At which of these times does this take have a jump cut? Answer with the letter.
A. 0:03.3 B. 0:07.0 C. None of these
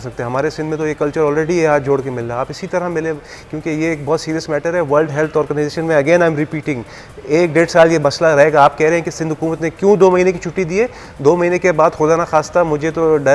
C